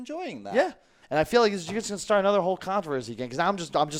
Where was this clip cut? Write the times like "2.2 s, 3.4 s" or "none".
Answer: 0.9 s